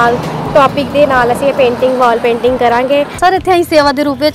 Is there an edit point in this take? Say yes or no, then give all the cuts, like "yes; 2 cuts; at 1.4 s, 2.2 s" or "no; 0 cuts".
yes; 1 cut; at 3.1 s